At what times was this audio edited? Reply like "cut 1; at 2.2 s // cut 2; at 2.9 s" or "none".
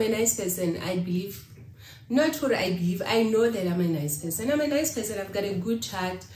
none